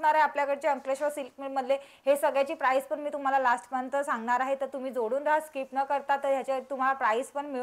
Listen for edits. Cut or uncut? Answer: uncut